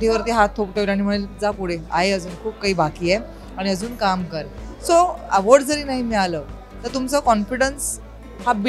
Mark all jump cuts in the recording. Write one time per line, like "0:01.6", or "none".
none